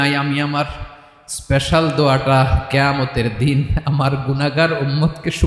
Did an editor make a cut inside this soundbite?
no; 0 cuts

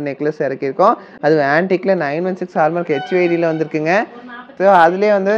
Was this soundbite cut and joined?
no; 0 cuts

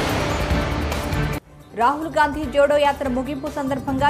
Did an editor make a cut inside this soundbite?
yes; 1 cut; at 1.2 s

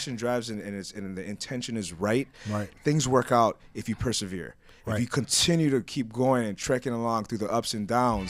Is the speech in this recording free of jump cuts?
yes; 0 cuts

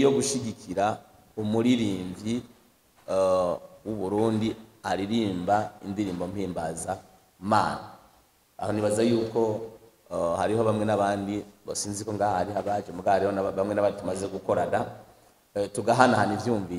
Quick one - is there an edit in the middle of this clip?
no; 0 cuts

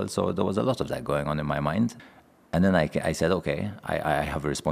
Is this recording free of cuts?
no; 1 cut; at 2.0 s

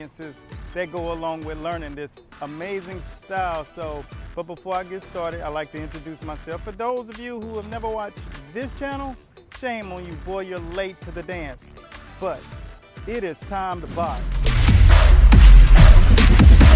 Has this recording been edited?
yes; 1 cut; at 4.2 s

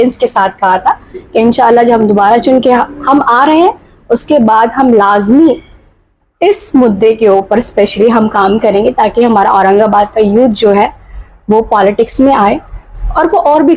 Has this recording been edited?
no; 0 cuts

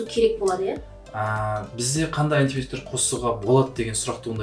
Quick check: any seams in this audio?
no; 0 cuts

